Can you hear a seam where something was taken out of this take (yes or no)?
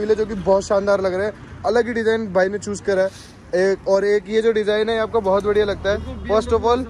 no